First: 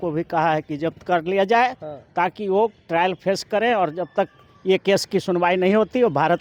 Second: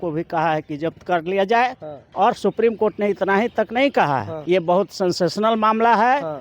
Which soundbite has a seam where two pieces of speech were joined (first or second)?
second